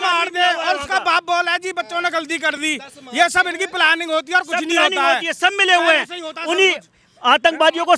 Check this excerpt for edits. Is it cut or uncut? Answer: uncut